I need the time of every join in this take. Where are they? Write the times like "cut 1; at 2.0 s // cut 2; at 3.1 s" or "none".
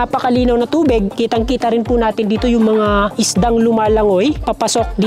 none

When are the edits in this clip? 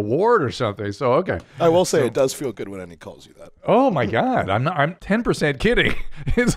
cut 1; at 1.5 s // cut 2; at 5.0 s

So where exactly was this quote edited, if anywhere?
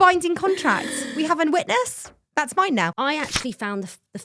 cut 1; at 2.9 s

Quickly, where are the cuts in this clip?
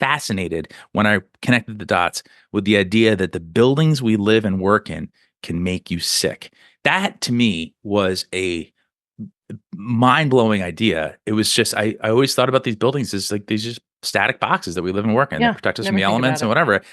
none

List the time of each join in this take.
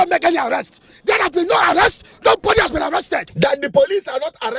cut 1; at 3.3 s

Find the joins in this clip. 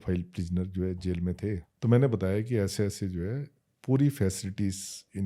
cut 1; at 1.7 s

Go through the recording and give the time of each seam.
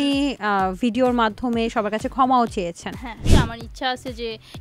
cut 1; at 3.3 s

